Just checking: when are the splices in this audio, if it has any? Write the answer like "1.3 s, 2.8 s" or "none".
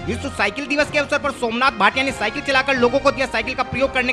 none